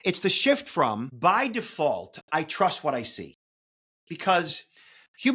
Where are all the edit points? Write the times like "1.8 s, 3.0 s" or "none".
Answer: 1.1 s

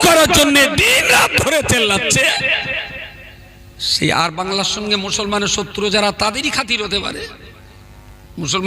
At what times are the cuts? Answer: none

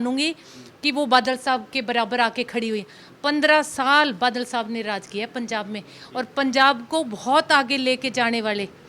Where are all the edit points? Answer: none

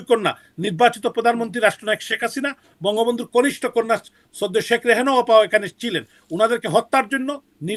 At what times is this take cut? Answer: none

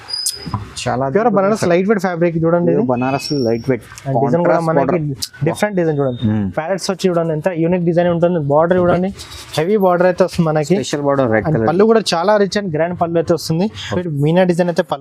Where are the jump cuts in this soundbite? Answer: 13.9 s

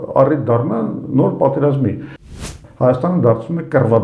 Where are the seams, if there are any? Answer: 2.3 s

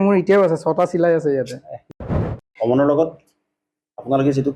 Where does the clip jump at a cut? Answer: 2.1 s

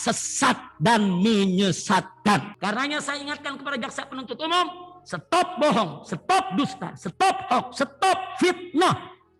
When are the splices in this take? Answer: 2.5 s

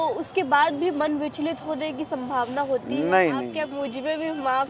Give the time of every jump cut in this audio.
3.5 s

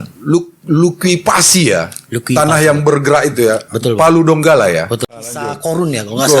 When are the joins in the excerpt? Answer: 5.1 s

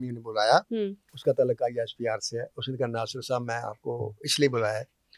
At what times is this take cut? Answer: 1.1 s

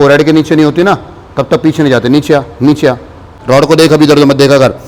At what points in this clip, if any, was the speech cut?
3.0 s

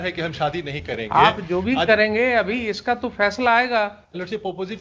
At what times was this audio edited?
none

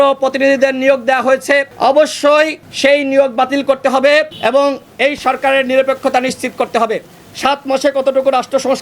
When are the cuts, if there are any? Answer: 1.7 s, 2.6 s, 4.3 s

